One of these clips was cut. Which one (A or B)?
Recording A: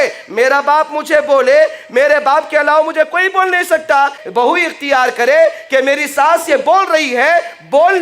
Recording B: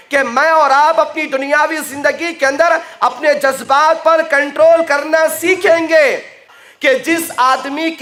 A